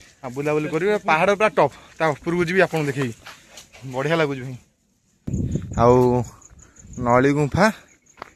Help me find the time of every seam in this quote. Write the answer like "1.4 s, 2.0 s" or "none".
5.2 s

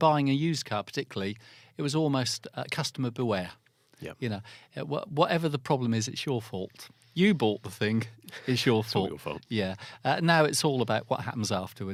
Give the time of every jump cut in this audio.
none

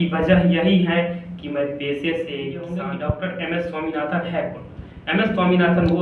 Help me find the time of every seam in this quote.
2.7 s

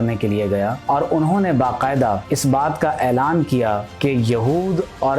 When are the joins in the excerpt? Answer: 2.3 s

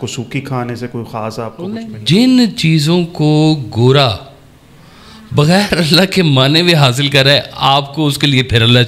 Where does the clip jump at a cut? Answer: 1.8 s

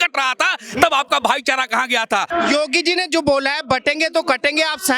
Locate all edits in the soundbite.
2.3 s

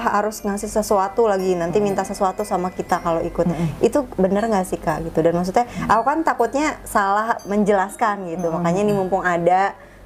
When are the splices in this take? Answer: none

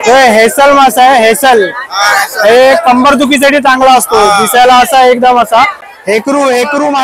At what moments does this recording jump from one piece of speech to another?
6.0 s

